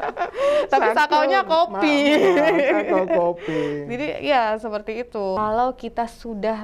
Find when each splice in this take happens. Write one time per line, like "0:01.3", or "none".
0:05.4